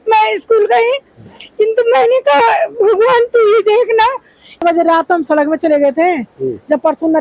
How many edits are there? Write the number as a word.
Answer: one